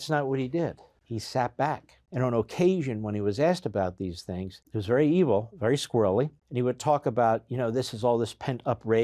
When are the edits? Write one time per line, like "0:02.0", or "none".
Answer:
0:00.9
0:01.9
0:04.7
0:06.4